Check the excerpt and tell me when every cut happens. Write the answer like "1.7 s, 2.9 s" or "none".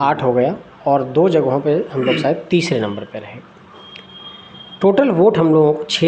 none